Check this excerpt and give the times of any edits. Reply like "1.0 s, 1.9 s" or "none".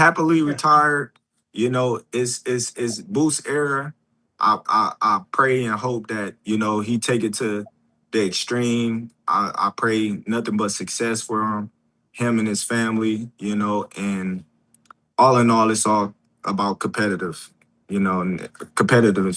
none